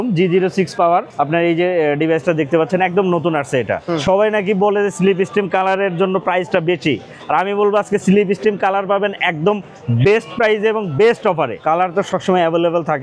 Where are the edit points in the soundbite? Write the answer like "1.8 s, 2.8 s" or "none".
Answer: 1.1 s, 3.8 s, 11.6 s